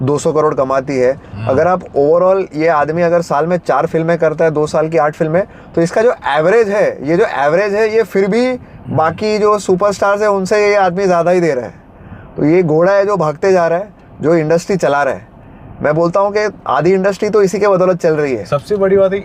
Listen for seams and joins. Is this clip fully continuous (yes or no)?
yes